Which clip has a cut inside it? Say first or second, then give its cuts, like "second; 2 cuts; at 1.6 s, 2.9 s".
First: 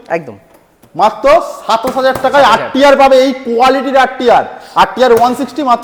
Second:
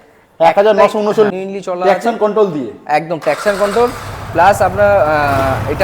second; 1 cut; at 1.3 s